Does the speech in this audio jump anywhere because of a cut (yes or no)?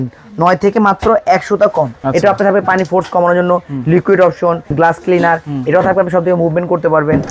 yes